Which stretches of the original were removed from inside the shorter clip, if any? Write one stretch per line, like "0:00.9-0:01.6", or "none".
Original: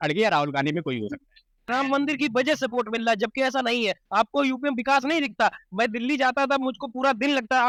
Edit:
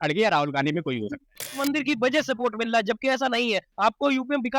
0:01.6-0:01.9